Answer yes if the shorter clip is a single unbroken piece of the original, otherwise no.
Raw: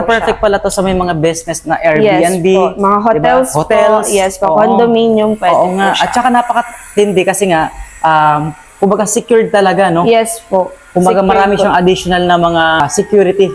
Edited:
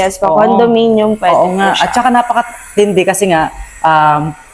yes